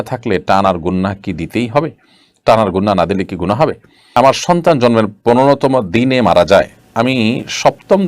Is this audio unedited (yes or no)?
no